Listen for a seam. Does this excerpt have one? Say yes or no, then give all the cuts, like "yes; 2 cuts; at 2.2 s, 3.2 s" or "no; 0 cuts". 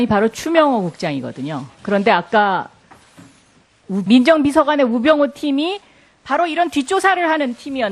no; 0 cuts